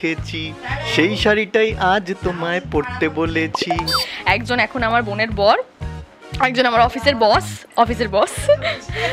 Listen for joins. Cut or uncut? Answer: cut